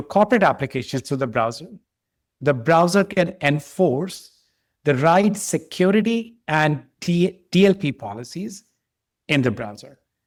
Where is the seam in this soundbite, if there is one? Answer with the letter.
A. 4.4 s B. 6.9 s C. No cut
C